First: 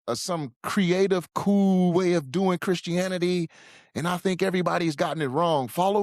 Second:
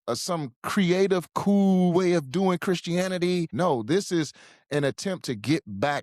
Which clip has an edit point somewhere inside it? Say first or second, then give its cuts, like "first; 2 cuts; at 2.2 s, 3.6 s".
second; 1 cut; at 3.5 s